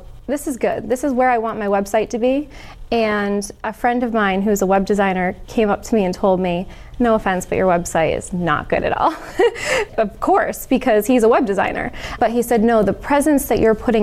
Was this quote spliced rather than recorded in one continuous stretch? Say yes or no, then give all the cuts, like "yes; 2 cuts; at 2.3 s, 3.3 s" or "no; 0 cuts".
no; 0 cuts